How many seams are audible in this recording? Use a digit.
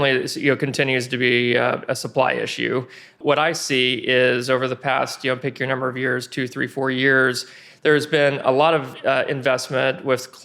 1